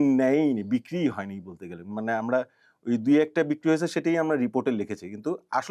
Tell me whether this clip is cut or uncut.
uncut